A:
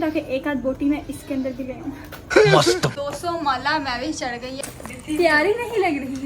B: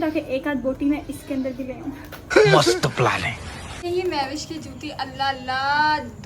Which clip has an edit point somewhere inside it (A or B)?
A